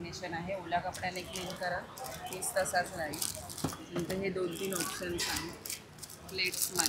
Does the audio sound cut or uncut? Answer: uncut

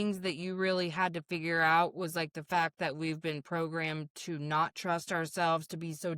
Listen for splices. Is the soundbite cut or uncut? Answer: uncut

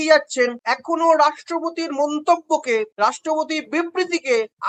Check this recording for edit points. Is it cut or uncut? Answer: uncut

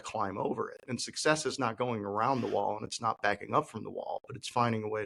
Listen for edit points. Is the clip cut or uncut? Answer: uncut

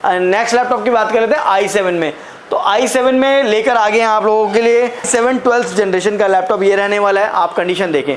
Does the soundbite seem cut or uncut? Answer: cut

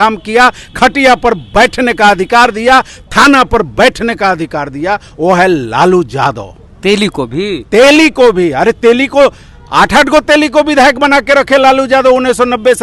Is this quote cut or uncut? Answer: uncut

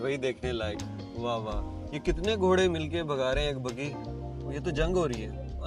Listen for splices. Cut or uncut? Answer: uncut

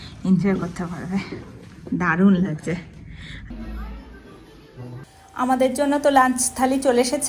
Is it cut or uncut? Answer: cut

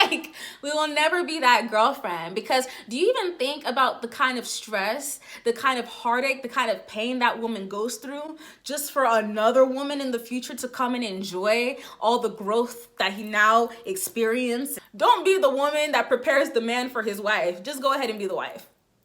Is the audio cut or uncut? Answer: cut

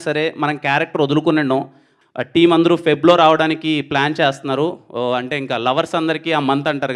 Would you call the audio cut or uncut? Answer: cut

